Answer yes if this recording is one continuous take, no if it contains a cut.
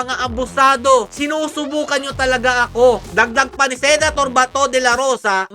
no